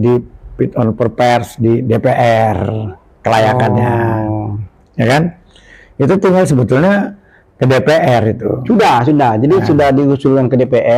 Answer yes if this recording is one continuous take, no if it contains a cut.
yes